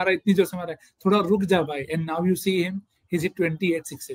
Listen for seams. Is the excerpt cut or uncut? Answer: uncut